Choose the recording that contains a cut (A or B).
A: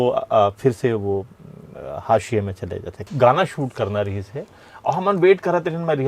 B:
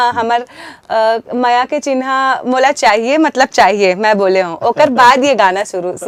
A